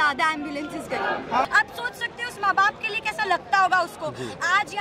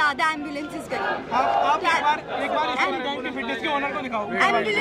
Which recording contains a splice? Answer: first; 1 cut; at 1.4 s

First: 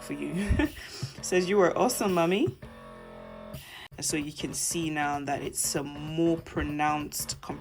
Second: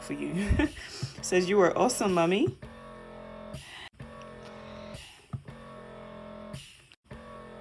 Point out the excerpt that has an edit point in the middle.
first; 1 cut; at 3.9 s

